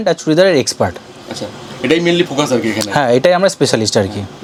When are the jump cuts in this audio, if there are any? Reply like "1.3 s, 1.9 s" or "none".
none